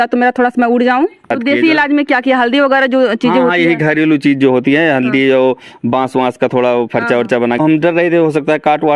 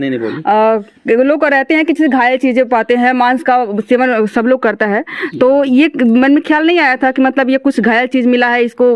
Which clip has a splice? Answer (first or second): first